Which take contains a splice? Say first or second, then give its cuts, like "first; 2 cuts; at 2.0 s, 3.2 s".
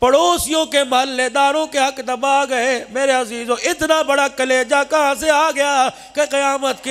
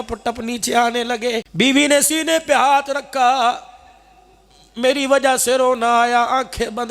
second; 1 cut; at 1.5 s